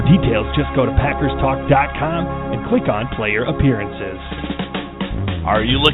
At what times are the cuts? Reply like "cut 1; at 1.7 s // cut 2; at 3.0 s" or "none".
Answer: cut 1; at 4.3 s